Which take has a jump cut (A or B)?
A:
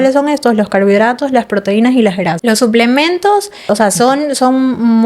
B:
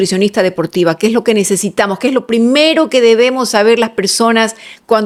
A